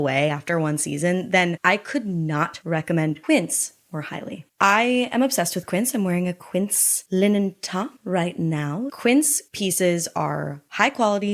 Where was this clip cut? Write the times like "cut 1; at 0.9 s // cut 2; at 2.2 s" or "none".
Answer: cut 1; at 3.2 s // cut 2; at 8.9 s